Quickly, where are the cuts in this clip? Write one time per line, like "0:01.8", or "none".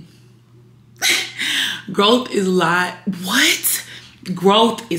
none